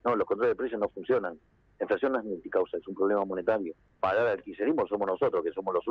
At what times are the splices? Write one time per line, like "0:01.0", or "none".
0:03.8

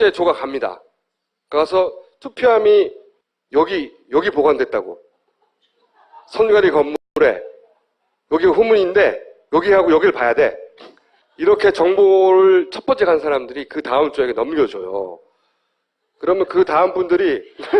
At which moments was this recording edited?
none

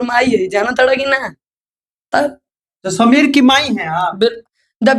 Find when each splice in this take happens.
none

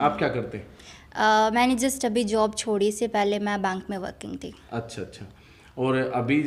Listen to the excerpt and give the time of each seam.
none

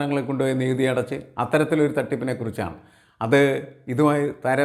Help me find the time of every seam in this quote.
none

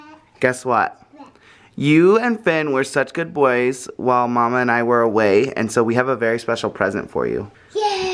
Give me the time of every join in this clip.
none

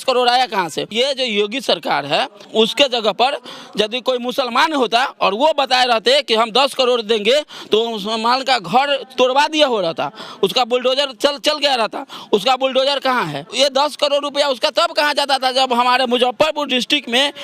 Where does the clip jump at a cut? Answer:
0:00.9
0:13.5

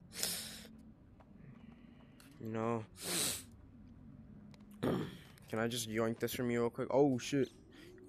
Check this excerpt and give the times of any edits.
none

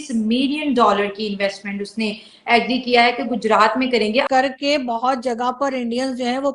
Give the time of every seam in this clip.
0:04.2

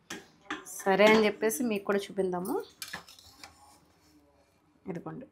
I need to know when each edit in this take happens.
none

